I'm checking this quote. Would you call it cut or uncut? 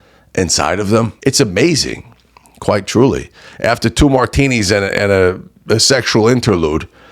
cut